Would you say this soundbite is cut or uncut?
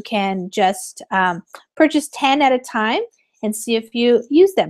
uncut